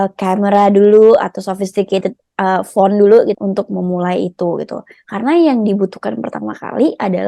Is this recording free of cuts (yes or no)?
no